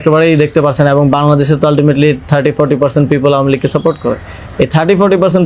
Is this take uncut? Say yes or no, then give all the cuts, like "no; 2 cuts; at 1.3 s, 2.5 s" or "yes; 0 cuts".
yes; 0 cuts